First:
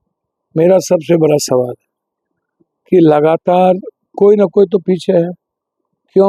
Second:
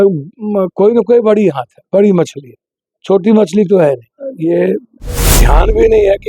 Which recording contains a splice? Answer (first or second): second